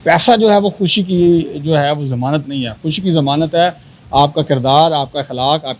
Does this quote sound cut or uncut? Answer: uncut